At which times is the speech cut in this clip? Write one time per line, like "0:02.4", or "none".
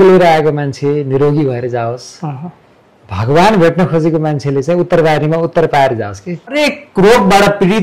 0:06.5